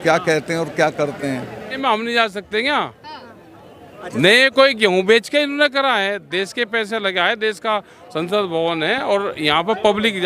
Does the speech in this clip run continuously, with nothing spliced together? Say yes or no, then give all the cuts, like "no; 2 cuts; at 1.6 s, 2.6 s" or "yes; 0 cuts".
no; 1 cut; at 1.6 s